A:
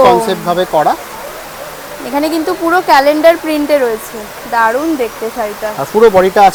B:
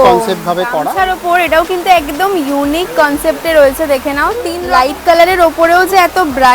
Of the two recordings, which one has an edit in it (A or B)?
B